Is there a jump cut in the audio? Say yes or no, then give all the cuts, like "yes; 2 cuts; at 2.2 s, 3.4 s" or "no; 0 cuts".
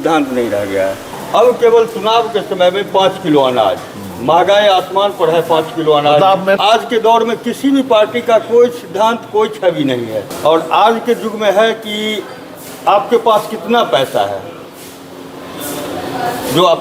yes; 3 cuts; at 1.1 s, 6.6 s, 10.2 s